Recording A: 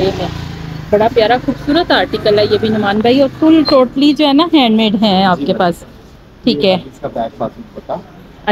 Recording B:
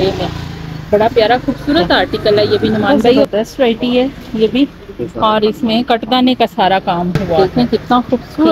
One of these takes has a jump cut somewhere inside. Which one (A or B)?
B